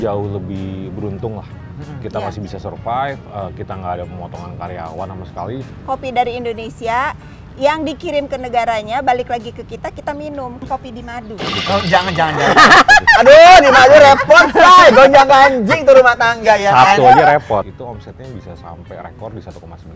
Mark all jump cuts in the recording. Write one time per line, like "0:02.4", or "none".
0:05.7
0:10.6
0:17.7